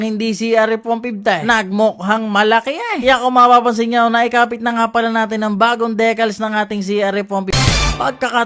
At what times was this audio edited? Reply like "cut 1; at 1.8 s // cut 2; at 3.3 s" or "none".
cut 1; at 7.4 s